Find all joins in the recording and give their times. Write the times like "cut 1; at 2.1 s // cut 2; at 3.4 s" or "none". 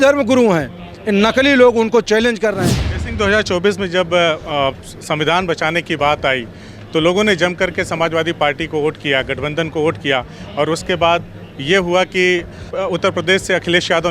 cut 1; at 2.8 s // cut 2; at 12.7 s